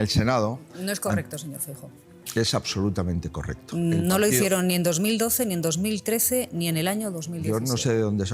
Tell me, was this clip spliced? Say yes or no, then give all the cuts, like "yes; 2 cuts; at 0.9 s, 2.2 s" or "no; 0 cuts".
no; 0 cuts